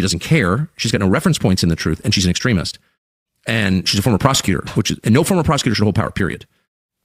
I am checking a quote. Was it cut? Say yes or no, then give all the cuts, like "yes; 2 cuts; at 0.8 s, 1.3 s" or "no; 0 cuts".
no; 0 cuts